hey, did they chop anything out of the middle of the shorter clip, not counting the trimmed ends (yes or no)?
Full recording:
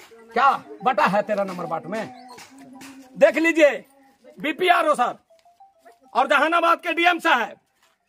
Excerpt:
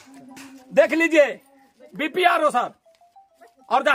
no